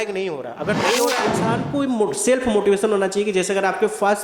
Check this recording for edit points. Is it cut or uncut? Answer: cut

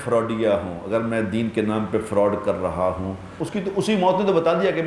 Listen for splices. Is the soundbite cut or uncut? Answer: cut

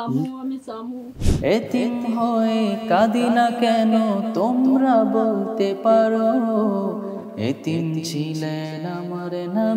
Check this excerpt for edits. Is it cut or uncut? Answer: cut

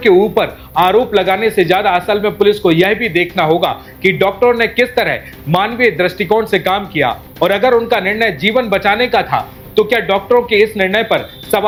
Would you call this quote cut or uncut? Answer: uncut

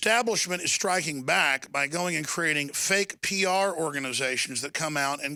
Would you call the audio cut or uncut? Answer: uncut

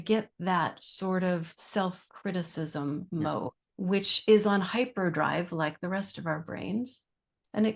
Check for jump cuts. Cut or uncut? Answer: cut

